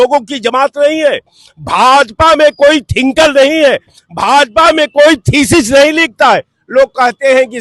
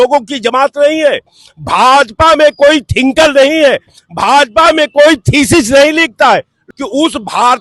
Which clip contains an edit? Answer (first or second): second